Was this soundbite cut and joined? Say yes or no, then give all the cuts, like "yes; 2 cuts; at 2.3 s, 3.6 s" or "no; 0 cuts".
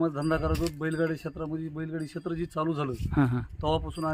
no; 0 cuts